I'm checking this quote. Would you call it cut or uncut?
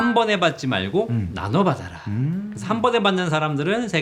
uncut